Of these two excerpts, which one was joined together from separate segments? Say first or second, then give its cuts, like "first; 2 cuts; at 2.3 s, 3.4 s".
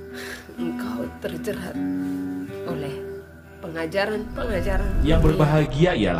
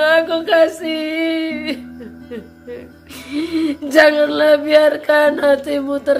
first; 1 cut; at 4.9 s